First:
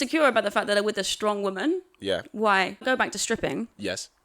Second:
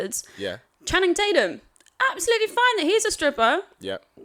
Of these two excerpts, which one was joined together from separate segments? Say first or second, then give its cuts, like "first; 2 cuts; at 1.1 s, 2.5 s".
first; 1 cut; at 2.8 s